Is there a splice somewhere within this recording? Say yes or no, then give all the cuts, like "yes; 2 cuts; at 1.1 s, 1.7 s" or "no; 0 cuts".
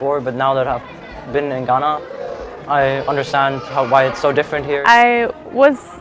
yes; 1 cut; at 4.8 s